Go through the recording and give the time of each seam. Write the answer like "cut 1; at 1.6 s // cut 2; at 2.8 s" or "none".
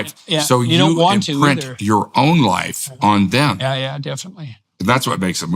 cut 1; at 4.6 s

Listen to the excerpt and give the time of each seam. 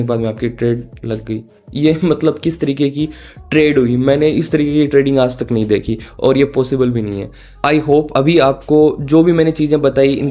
none

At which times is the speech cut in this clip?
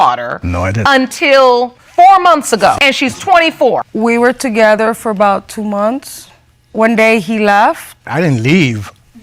none

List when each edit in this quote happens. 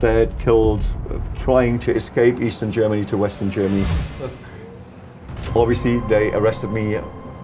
cut 1; at 4.3 s

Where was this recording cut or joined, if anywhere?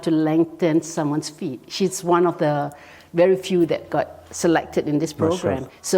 none

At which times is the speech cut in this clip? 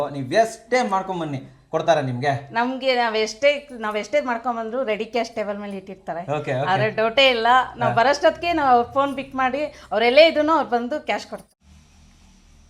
cut 1; at 11.6 s

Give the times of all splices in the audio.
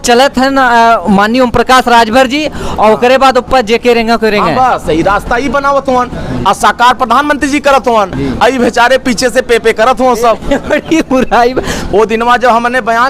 cut 1; at 11.8 s

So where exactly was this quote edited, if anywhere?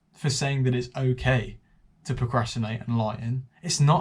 none

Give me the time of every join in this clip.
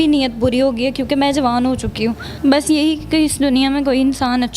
cut 1; at 2.3 s

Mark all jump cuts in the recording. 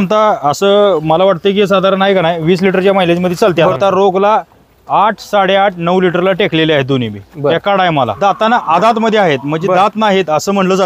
cut 1; at 3.7 s // cut 2; at 8.1 s

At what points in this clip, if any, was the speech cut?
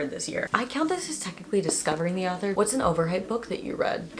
cut 1; at 2.5 s

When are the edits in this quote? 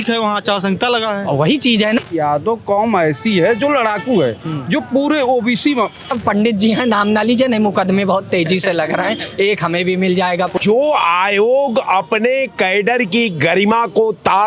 cut 1; at 2.0 s // cut 2; at 6.1 s // cut 3; at 10.5 s

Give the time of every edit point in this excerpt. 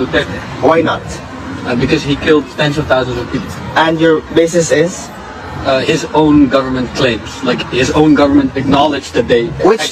none

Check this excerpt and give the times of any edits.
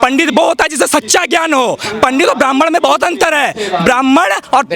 none

